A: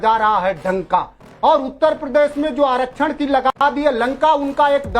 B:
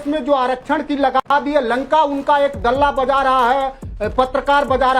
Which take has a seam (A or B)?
A